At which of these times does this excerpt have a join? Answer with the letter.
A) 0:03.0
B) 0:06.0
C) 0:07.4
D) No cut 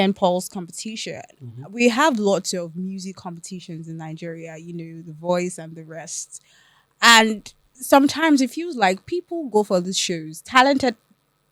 D